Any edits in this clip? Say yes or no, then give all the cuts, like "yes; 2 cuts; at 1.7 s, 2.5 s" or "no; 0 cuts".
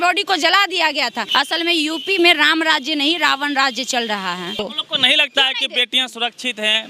yes; 2 cuts; at 1.2 s, 4.6 s